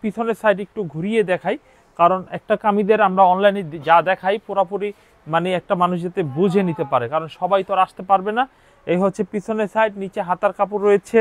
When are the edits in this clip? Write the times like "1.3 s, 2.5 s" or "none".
none